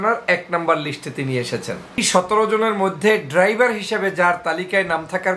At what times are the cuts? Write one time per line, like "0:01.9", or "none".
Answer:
0:02.0